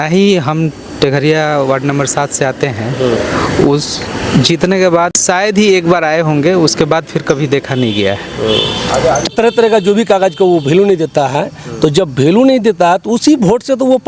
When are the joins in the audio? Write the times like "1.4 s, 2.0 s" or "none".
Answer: 5.2 s, 9.3 s